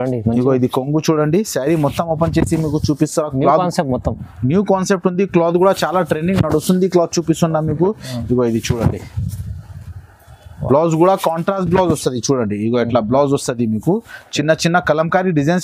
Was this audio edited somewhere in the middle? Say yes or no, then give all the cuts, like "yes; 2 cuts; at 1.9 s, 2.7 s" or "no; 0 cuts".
no; 0 cuts